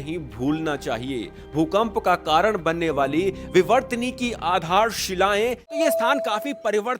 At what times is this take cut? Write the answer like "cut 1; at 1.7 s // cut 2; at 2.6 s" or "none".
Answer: cut 1; at 5.8 s